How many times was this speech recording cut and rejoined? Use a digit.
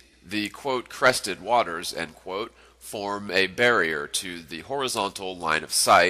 0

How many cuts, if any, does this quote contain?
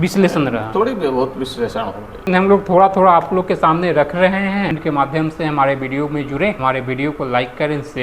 3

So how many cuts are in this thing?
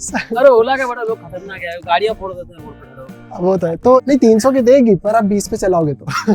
1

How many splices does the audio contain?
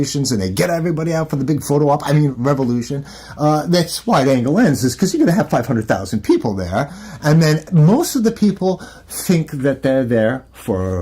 2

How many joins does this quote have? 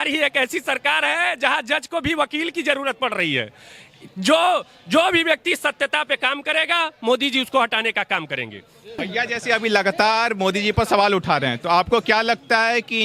0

